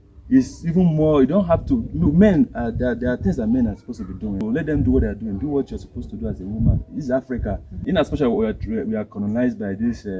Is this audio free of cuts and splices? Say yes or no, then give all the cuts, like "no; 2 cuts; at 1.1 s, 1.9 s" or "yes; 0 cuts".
no; 2 cuts; at 4.4 s, 7.7 s